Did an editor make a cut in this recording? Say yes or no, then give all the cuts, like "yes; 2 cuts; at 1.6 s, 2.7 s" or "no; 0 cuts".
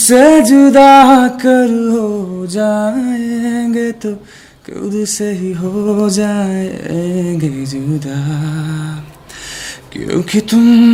no; 0 cuts